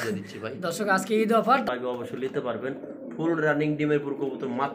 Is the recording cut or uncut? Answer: cut